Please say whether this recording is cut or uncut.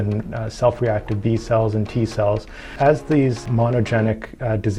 cut